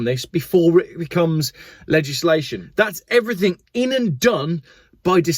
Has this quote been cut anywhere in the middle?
yes; 1 cut; at 2.6 s

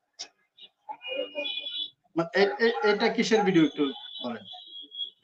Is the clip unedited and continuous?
yes; 0 cuts

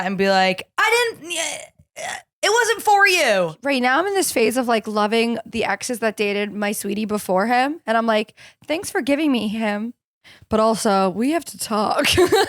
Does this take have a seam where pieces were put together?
yes; 1 cut; at 3.6 s

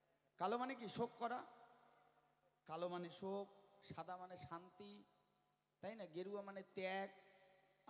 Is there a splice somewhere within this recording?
no; 0 cuts

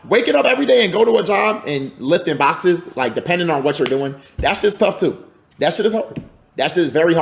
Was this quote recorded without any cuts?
yes; 0 cuts

